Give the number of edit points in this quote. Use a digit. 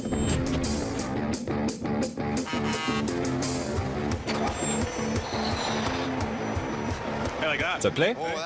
1